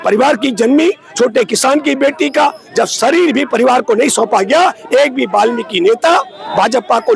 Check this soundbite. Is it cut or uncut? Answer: uncut